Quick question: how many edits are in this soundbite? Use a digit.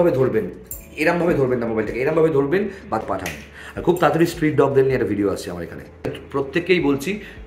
2